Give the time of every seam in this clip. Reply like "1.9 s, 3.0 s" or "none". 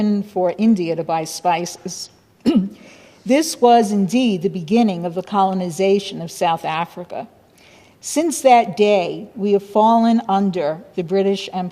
1.7 s

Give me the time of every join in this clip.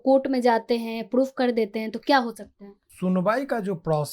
2.8 s

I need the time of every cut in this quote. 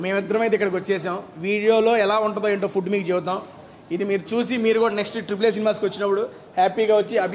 none

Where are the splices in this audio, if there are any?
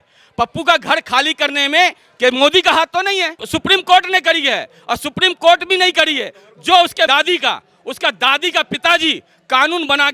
3.5 s, 7.1 s

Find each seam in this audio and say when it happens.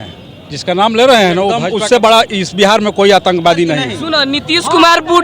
1.8 s, 4.0 s

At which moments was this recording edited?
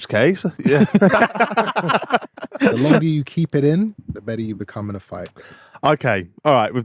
1.1 s, 3.0 s, 4.0 s

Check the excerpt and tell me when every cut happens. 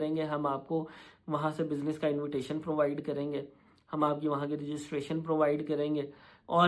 none

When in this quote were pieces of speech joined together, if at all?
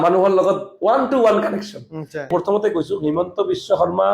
2.3 s

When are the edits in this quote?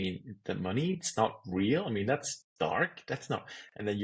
none

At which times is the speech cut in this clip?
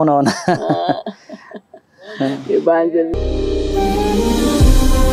3.2 s

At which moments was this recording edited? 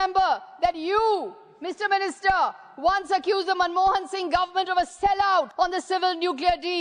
5.5 s

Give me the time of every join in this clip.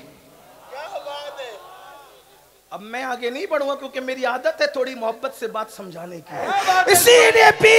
6.5 s

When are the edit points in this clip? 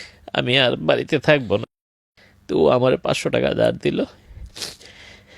1.7 s

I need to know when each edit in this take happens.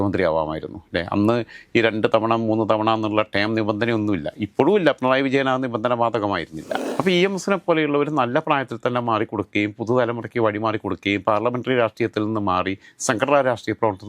6.7 s

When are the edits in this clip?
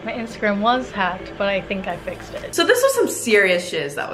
2.4 s

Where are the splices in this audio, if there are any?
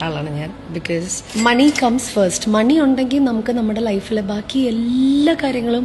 none

